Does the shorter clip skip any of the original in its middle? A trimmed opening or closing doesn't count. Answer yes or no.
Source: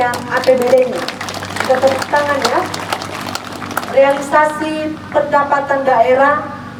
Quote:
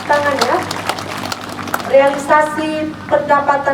no